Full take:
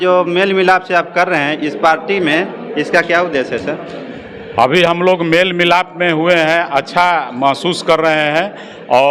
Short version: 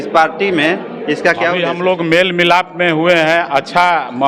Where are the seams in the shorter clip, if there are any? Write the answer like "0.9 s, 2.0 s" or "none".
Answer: 1.7 s